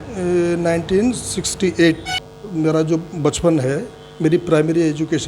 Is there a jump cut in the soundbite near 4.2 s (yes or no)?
no